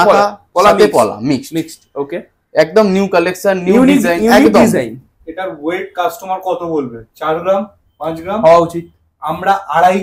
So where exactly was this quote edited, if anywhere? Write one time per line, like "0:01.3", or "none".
none